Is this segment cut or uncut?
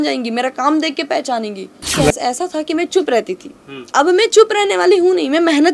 cut